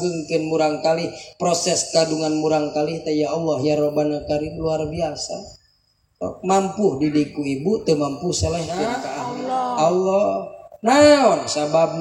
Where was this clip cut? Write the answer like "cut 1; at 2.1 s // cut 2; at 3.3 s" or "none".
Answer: cut 1; at 9.2 s